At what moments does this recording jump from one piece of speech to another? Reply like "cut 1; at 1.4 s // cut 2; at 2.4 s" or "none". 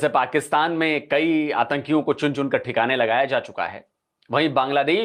none